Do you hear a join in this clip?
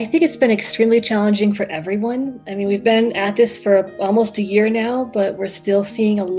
no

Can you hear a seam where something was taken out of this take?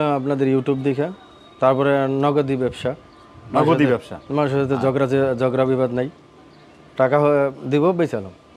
no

